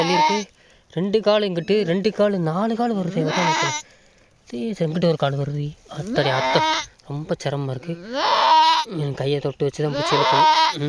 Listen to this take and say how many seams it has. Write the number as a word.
zero